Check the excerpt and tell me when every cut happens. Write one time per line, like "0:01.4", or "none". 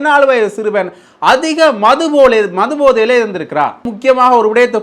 0:03.9